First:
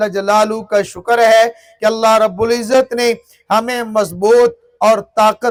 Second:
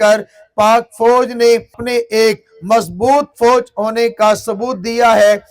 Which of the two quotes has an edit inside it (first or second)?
second